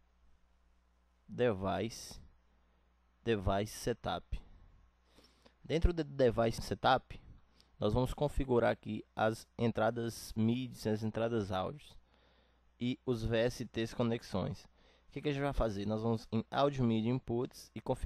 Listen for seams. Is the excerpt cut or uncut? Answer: cut